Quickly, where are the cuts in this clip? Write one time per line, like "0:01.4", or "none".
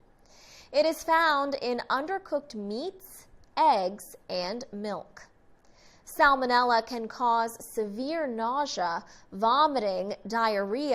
0:01.3